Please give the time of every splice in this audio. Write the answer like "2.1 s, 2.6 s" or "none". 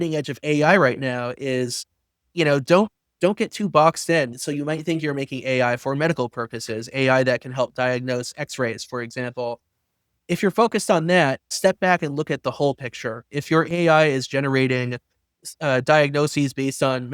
4.3 s, 11.5 s